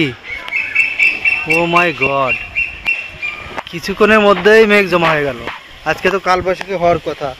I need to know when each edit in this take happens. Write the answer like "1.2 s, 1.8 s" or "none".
none